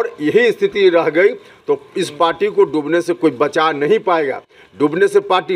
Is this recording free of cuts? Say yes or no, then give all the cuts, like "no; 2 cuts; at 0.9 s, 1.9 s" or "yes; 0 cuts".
yes; 0 cuts